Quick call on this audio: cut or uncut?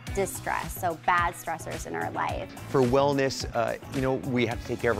cut